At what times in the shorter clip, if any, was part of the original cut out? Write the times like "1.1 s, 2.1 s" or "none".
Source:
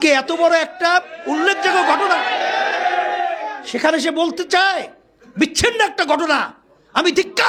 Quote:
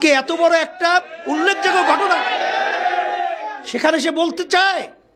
none